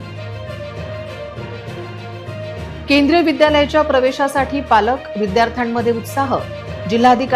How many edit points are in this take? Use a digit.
2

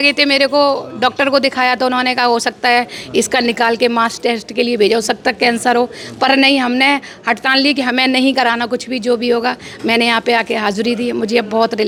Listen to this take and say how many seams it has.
0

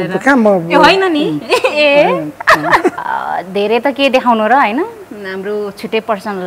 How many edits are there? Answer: 1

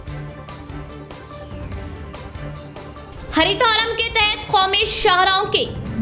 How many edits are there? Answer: 1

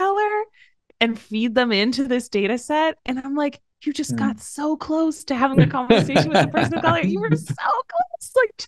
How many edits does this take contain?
0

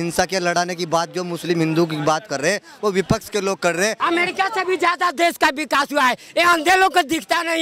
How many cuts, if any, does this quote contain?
1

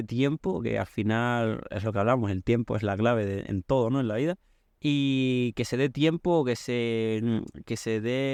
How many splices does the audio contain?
0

